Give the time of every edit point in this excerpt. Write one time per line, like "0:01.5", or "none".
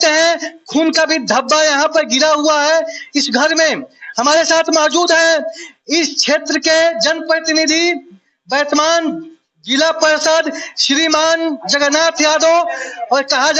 none